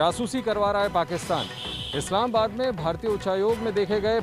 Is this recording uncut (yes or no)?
yes